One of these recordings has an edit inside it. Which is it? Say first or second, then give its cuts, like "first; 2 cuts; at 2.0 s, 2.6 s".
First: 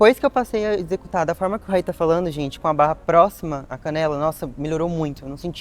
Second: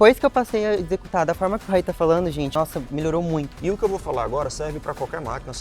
second; 2 cuts; at 2.5 s, 3.5 s